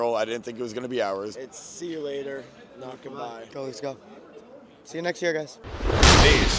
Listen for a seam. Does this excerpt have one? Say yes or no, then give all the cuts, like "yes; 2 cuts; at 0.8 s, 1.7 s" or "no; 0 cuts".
yes; 3 cuts; at 1.3 s, 3.5 s, 5.6 s